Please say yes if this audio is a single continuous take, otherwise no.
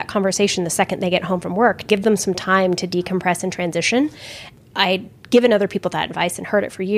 no